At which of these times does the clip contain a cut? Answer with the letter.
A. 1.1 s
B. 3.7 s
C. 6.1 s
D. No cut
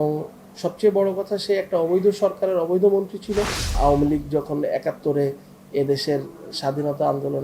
B